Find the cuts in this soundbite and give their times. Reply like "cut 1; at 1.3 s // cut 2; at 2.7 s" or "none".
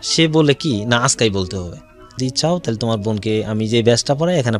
cut 1; at 2.2 s